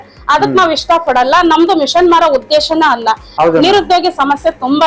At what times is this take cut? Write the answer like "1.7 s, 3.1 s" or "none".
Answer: 3.3 s